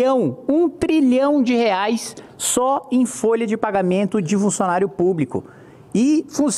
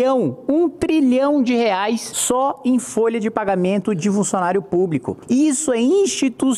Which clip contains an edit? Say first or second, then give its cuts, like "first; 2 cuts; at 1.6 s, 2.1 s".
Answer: second; 2 cuts; at 2.1 s, 5.1 s